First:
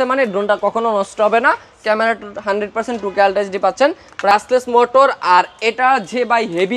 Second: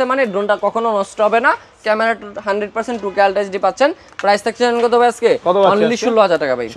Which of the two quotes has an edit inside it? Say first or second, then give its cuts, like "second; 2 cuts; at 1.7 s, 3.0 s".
first; 1 cut; at 4.3 s